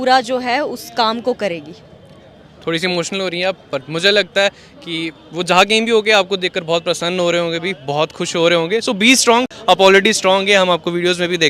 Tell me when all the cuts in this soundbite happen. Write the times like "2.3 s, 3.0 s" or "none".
none